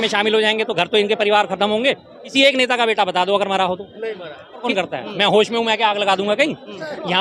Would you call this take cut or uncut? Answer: cut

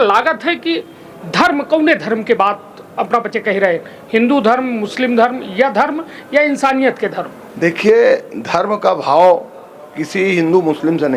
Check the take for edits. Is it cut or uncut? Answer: uncut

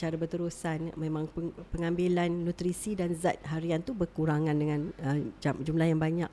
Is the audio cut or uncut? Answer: uncut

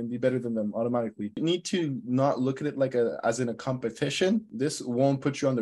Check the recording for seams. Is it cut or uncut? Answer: cut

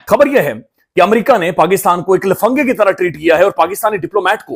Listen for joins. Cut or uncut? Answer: uncut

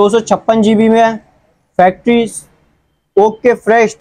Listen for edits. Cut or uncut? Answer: uncut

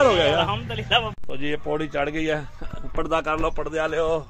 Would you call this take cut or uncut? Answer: cut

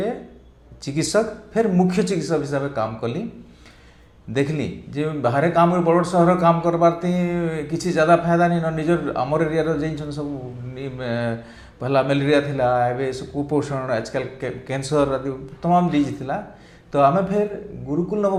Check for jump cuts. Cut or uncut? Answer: uncut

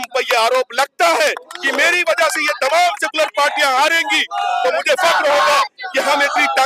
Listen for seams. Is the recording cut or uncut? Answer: uncut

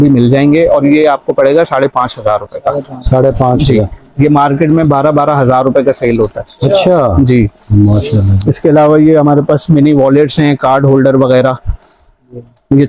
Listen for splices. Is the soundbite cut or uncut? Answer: uncut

